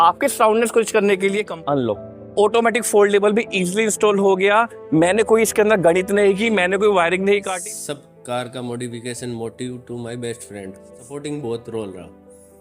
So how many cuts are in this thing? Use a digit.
3